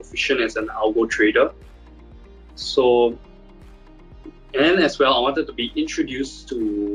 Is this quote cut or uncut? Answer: uncut